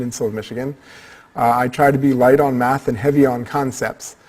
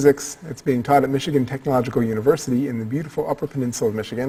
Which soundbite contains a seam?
first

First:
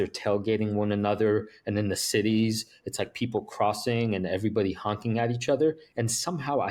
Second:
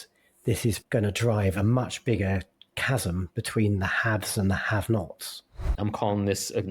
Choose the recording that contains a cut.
second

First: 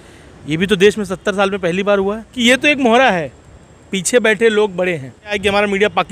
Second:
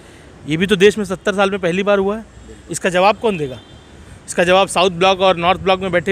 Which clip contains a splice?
first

